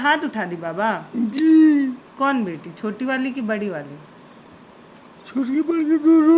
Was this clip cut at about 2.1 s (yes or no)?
yes